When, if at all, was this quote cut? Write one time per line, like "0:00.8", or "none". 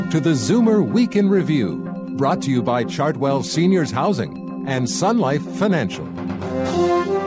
0:06.0